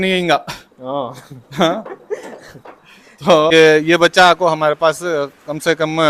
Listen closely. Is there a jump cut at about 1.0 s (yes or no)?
no